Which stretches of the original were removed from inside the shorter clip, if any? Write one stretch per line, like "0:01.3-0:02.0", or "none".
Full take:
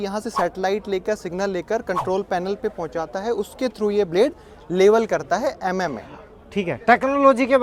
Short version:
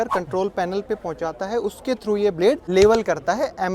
0:04.4-0:04.7